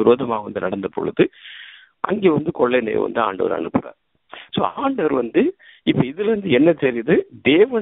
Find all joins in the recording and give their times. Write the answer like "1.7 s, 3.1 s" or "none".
none